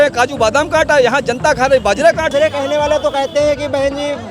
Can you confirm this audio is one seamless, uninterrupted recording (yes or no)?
no